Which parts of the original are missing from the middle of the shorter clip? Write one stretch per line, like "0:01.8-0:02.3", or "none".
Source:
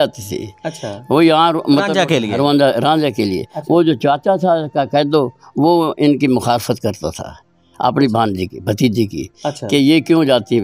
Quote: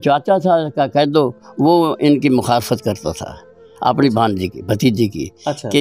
none